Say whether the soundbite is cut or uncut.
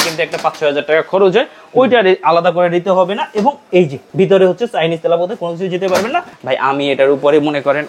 cut